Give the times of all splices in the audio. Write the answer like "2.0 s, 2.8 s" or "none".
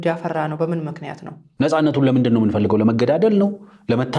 1.5 s